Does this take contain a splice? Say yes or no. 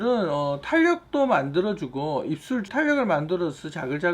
yes